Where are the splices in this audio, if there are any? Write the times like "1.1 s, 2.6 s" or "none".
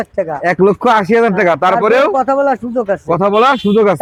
none